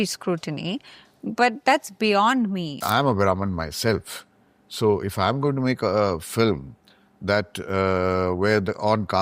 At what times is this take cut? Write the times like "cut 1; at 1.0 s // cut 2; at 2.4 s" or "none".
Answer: cut 1; at 2.8 s